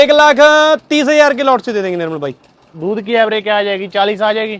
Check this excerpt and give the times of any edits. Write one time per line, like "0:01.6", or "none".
none

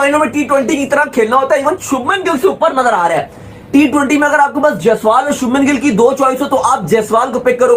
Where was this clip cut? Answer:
none

